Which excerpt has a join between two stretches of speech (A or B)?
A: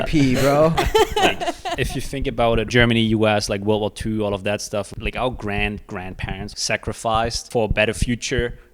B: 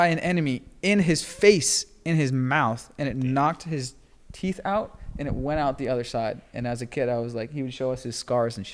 A